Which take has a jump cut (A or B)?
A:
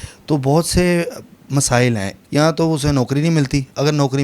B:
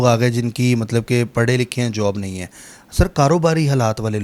A